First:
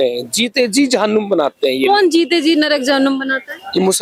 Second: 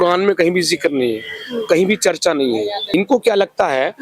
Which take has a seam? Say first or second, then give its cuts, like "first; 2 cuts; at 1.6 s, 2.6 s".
second; 1 cut; at 2.9 s